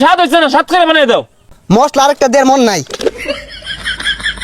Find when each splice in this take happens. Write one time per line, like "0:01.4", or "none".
0:01.5
0:03.3